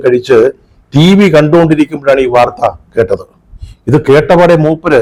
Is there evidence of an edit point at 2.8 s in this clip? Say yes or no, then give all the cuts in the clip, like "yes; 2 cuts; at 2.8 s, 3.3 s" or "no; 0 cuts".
no; 0 cuts